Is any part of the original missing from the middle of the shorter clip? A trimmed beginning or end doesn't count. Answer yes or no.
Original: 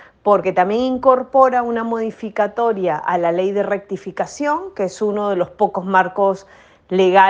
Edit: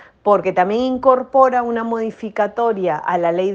no